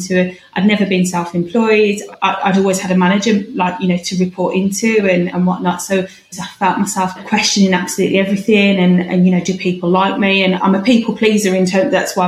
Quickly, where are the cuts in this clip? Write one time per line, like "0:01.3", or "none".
0:06.4